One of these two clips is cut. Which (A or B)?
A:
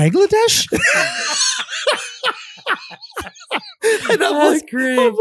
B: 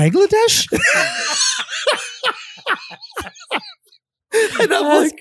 A